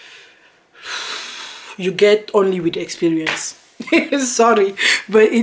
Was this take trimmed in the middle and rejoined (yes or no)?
no